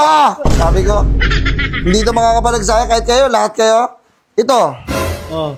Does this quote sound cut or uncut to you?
uncut